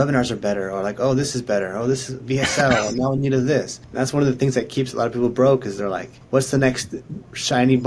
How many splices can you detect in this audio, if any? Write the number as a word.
two